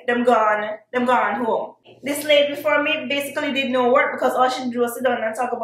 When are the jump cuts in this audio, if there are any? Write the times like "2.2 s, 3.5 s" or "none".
1.8 s